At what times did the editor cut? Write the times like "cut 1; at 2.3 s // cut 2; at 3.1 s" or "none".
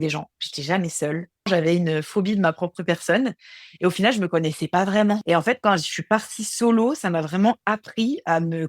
cut 1; at 1.5 s // cut 2; at 5.2 s